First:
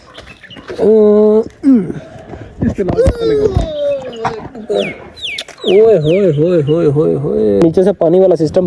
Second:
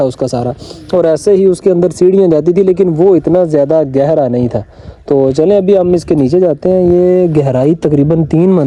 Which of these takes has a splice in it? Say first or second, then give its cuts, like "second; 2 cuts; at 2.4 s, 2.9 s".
first; 1 cut; at 7.6 s